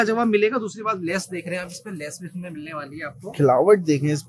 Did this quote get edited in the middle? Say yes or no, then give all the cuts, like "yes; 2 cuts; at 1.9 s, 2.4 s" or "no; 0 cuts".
no; 0 cuts